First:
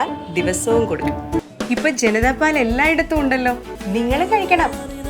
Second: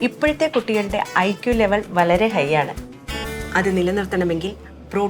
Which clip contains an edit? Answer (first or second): first